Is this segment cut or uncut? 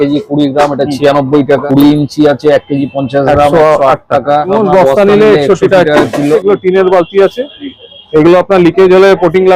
cut